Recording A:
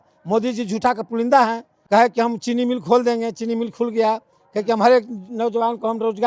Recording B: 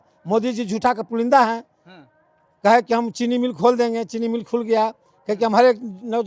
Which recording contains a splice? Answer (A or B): A